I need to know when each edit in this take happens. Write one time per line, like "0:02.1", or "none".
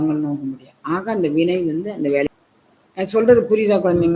0:02.3